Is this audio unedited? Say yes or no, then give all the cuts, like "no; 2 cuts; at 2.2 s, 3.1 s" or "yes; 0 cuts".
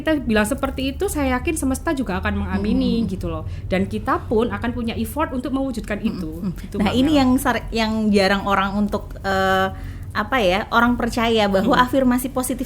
yes; 0 cuts